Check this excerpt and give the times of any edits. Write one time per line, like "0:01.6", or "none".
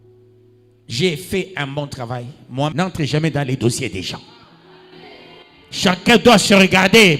0:02.7